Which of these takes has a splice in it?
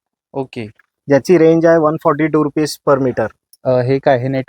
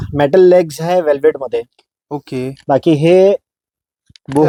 first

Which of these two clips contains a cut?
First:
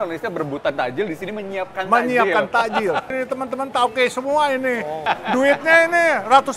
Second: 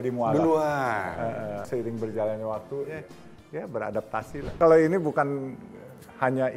second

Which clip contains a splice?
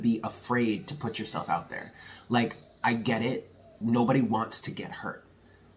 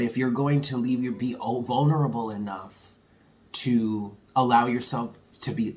second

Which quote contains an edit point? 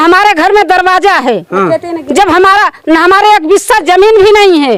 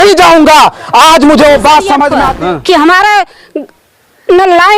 second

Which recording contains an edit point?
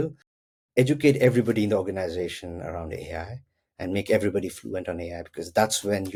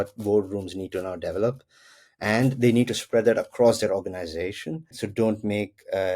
second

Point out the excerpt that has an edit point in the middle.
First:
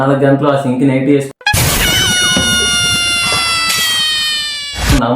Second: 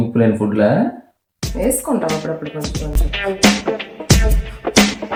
first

